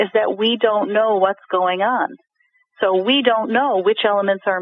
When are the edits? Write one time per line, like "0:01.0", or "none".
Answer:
none